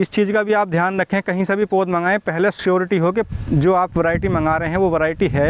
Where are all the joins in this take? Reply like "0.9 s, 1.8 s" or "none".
none